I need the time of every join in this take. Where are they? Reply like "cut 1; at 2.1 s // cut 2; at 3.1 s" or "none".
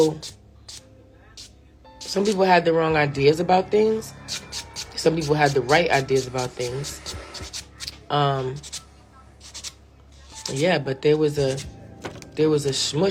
none